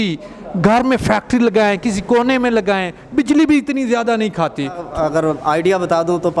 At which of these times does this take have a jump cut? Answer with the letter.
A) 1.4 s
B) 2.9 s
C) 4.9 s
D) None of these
C